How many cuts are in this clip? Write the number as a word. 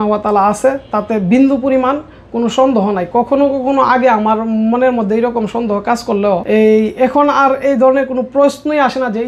one